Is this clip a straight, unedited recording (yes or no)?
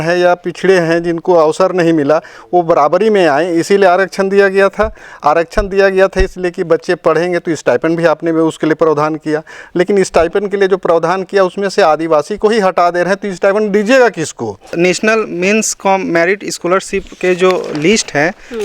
no